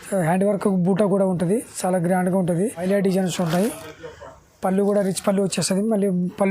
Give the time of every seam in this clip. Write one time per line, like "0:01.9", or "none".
0:02.8